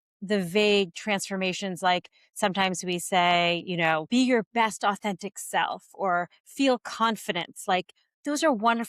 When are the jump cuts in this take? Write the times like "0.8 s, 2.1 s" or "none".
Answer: 4.0 s